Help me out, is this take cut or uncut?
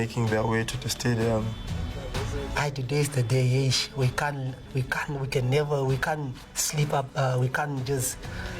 uncut